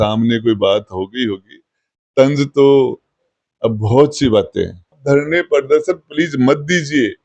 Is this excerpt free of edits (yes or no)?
no